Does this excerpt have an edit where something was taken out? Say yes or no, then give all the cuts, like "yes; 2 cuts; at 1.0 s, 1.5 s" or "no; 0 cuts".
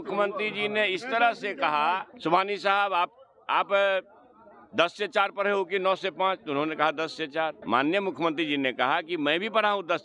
yes; 2 cuts; at 2.1 s, 7.6 s